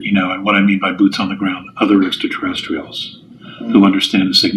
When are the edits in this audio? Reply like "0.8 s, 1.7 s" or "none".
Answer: none